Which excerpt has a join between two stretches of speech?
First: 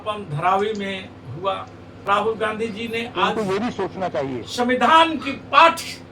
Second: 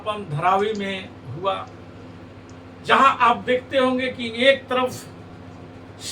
first; 1 cut; at 2.1 s

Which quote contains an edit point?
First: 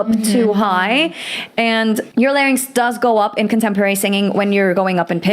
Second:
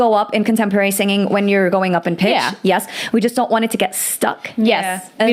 first; 1 cut; at 2.1 s

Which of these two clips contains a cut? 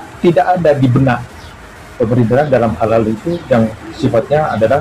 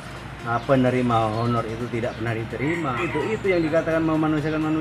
second; 1 cut; at 3.0 s

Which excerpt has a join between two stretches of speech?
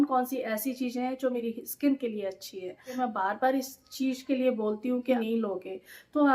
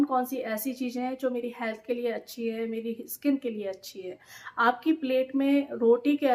first; 3 cuts; at 1.4 s, 3.0 s, 5.2 s

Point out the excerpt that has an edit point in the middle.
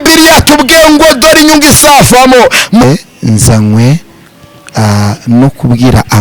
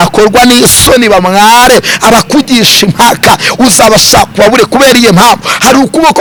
first; 1 cut; at 2.8 s

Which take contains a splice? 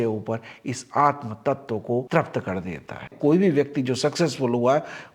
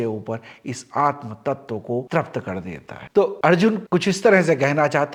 first; 1 cut; at 3.0 s

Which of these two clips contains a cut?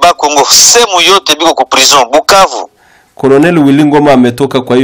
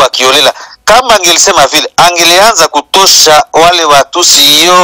first; 1 cut; at 2.7 s

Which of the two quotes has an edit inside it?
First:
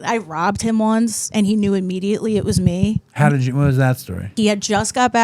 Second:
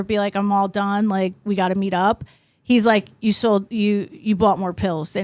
first; 1 cut; at 4.3 s

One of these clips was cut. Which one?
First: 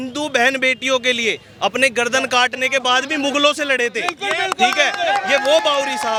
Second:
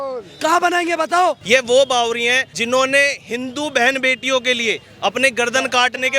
second; 2 cuts; at 1.4 s, 2.5 s

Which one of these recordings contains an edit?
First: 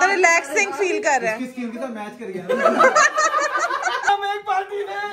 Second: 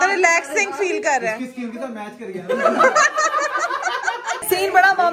first; 1 cut; at 4.0 s

